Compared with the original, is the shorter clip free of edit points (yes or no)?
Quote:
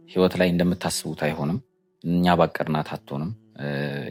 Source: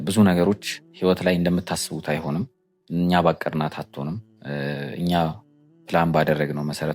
yes